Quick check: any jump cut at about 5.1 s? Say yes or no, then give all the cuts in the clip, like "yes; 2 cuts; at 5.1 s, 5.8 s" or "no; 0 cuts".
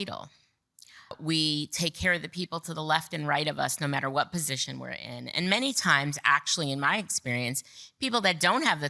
no; 1 cut; at 1.2 s